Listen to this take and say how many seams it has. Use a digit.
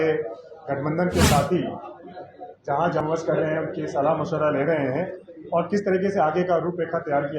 1